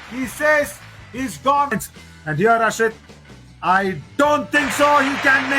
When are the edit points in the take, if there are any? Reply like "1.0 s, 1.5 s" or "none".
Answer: 1.7 s